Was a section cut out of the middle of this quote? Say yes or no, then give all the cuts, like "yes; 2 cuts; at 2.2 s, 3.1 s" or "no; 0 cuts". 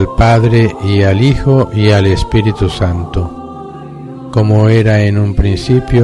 no; 0 cuts